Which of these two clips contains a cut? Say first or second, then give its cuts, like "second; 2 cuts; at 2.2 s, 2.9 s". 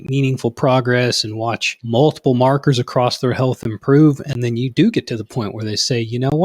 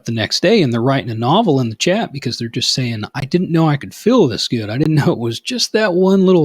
first; 1 cut; at 1.7 s